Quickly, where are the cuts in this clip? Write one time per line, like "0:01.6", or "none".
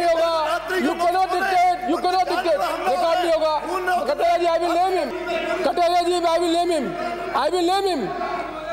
0:05.1